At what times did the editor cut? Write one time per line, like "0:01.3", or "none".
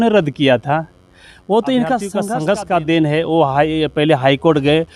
0:02.3

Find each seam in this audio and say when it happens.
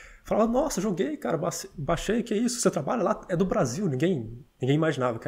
none

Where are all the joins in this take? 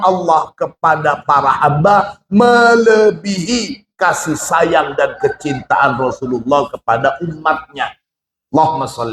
none

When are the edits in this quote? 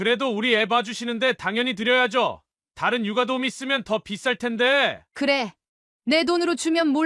none

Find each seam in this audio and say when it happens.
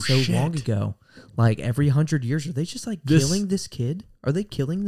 none

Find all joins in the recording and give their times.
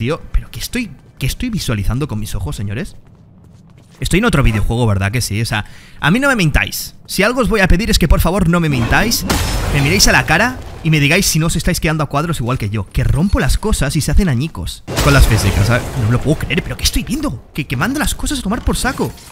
0:14.8

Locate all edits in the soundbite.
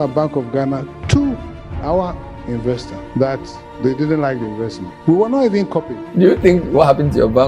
0:02.9
0:04.8
0:06.0

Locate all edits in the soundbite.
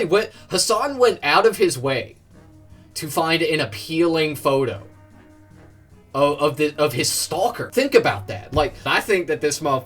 0:08.8

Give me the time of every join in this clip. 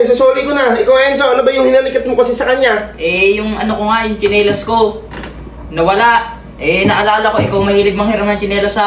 none

